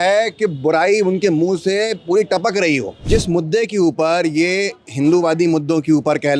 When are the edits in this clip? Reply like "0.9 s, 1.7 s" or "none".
3.0 s